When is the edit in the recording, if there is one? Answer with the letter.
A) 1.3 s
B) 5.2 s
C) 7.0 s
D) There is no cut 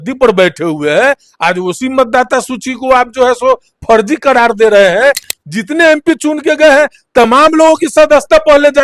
B